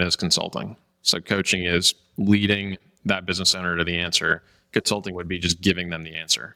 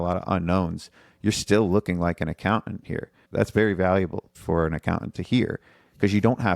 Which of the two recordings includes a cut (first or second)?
second